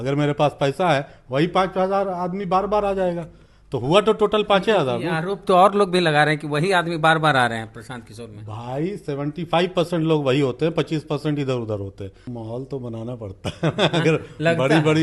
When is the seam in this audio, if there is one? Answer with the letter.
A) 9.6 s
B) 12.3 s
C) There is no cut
B